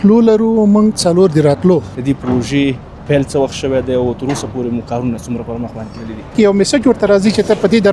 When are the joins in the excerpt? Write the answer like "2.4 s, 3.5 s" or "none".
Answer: 1.9 s, 6.3 s